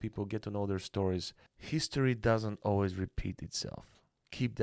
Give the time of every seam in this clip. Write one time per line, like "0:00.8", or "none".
0:01.4